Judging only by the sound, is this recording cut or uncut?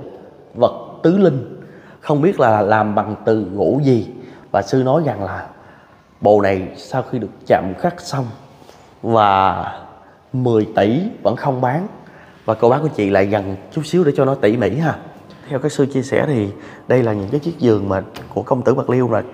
cut